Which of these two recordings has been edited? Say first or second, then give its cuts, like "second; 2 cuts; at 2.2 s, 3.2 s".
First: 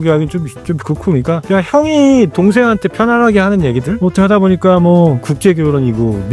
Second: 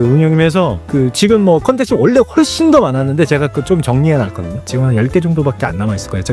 first; 3 cuts; at 1.4 s, 3.9 s, 5.3 s